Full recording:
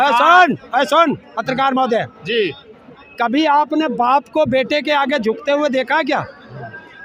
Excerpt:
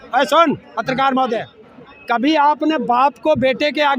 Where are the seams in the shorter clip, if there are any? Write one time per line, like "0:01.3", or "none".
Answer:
0:01.6